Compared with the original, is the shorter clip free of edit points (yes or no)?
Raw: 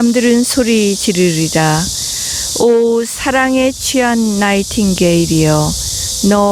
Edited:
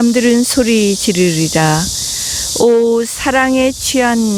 yes